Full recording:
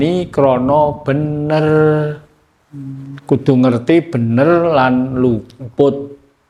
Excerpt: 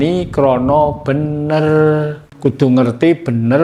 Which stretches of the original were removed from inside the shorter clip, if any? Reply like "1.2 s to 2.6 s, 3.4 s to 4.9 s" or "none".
2.2 s to 3.1 s